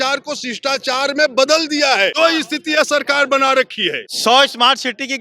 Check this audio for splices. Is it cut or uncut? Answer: cut